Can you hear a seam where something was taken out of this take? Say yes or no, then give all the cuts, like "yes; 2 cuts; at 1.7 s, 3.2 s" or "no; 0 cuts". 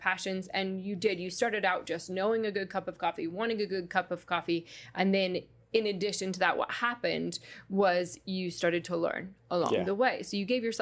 no; 0 cuts